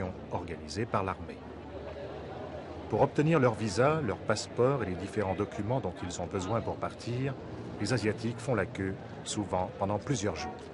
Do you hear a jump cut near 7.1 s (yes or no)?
yes